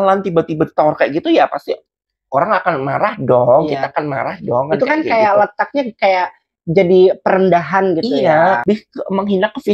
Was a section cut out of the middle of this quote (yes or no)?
yes